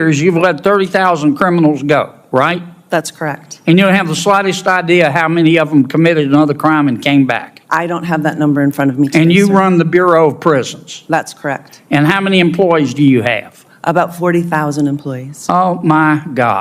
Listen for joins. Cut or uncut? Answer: uncut